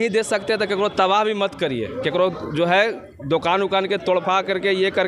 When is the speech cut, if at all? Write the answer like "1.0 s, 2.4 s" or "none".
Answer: none